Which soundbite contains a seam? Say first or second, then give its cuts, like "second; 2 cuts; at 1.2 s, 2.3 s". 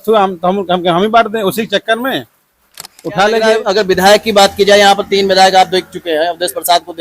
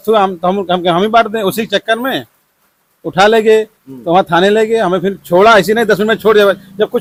first; 1 cut; at 3.6 s